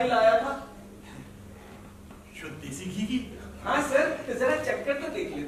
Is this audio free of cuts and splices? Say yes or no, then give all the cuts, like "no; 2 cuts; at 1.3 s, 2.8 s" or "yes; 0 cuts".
yes; 0 cuts